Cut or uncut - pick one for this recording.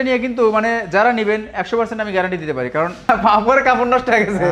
cut